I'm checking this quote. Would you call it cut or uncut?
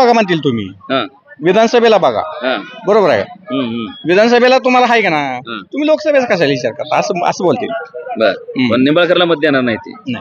uncut